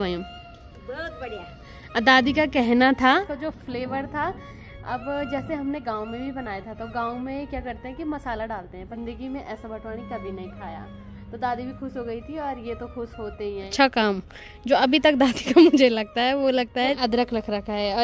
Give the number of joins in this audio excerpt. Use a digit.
4